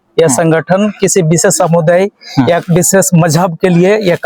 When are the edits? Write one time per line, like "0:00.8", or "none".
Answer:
none